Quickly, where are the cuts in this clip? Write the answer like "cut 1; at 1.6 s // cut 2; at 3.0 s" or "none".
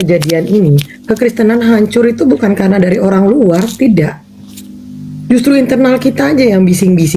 none